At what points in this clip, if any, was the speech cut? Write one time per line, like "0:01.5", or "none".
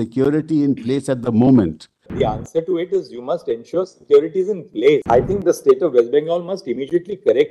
0:02.0
0:05.0